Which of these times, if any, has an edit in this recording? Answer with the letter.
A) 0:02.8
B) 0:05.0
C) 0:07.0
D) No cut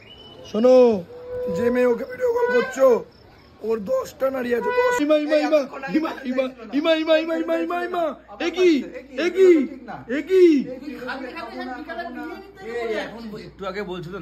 B